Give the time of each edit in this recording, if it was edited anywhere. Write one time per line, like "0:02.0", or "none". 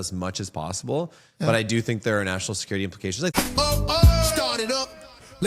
0:03.3